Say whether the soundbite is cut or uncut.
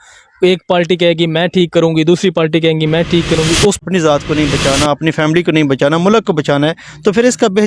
cut